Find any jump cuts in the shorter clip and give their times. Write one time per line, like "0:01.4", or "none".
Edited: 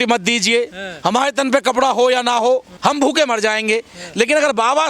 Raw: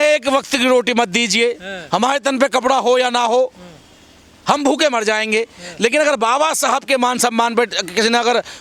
0:02.7